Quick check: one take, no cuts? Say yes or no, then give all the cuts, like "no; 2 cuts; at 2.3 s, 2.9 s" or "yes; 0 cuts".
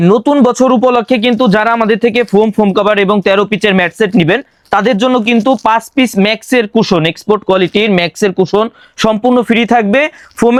yes; 0 cuts